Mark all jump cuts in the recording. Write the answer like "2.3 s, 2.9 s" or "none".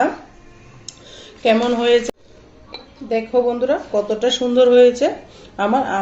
2.0 s